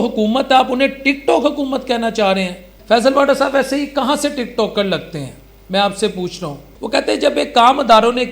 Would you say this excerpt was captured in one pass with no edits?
no; 2 cuts; at 2.7 s, 6.7 s

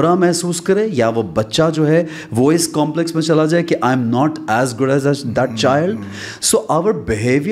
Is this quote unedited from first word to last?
yes; 0 cuts

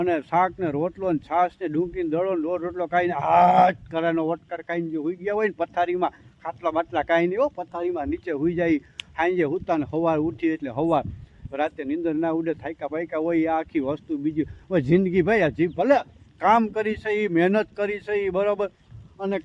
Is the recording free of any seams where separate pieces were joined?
yes; 0 cuts

